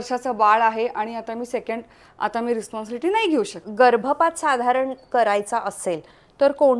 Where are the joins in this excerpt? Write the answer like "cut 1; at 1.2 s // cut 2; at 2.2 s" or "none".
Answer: cut 1; at 3.6 s